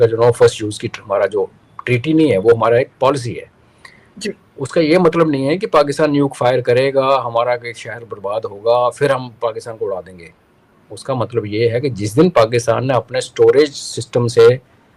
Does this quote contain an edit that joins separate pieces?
no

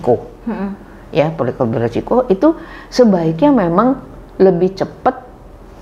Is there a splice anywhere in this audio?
no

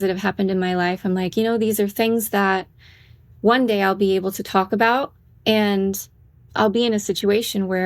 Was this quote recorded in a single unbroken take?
yes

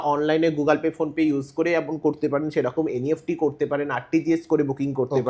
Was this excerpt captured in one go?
yes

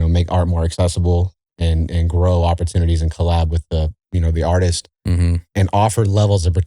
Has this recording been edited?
no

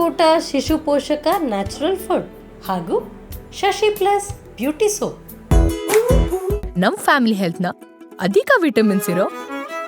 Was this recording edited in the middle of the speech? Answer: yes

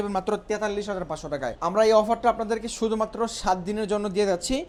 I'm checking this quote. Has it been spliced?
no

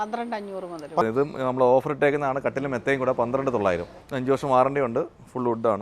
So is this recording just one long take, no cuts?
no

